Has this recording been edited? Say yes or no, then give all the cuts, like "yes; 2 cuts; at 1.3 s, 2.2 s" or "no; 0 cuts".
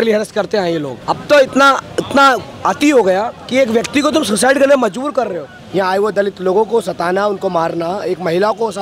yes; 4 cuts; at 0.9 s, 2.5 s, 3.4 s, 5.6 s